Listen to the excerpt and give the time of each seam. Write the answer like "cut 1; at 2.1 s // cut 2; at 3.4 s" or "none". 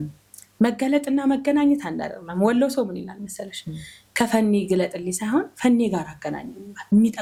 none